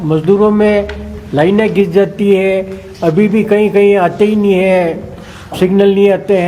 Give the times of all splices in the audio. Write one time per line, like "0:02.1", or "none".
none